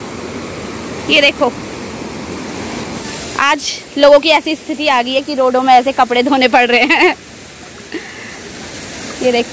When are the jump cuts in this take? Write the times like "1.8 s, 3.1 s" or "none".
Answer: 3.0 s